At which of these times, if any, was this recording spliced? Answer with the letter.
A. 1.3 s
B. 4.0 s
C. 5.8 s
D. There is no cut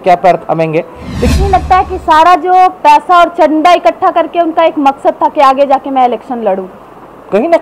A